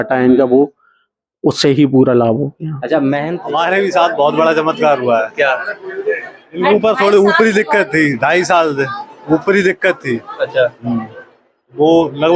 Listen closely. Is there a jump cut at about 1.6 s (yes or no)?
no